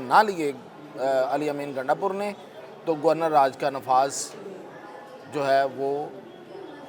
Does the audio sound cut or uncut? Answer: uncut